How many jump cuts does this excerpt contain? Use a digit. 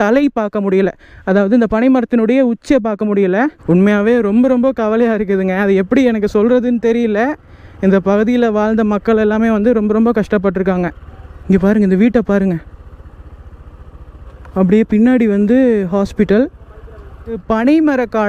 4